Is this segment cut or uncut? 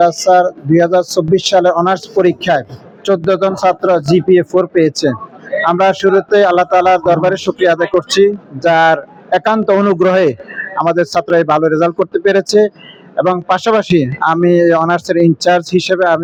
uncut